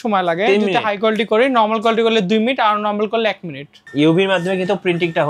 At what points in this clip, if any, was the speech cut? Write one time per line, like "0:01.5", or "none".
0:03.8